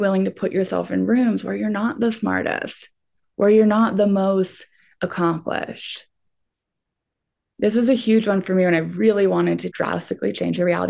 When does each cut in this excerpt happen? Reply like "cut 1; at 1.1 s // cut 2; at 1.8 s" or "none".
none